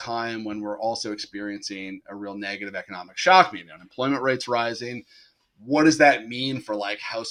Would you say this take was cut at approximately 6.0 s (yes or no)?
no